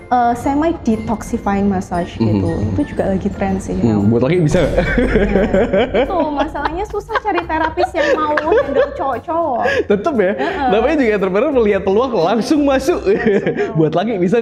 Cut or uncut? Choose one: uncut